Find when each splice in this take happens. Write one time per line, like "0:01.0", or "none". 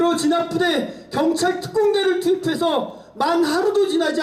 none